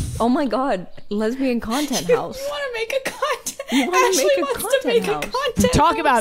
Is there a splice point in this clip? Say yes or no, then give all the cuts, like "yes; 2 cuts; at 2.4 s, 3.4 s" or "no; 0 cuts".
yes; 1 cut; at 0.9 s